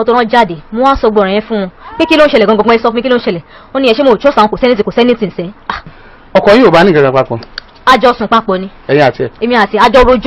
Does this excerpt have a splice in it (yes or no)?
yes